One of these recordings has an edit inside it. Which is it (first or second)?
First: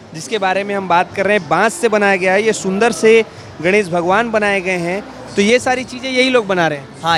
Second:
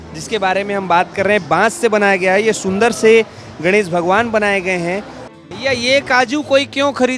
second